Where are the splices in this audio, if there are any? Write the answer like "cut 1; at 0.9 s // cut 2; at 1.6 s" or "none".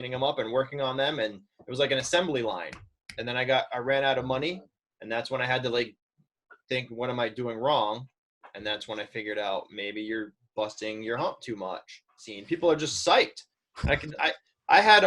cut 1; at 12.3 s